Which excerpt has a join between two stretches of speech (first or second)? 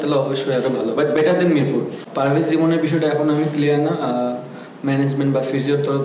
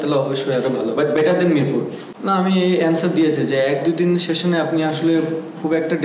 first